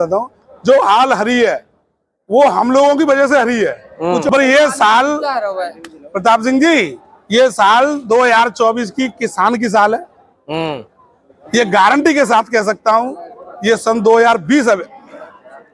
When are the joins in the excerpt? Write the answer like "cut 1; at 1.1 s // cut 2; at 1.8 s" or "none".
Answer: cut 1; at 4.3 s